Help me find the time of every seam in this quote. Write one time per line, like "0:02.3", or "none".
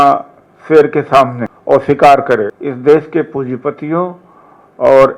0:01.5
0:02.6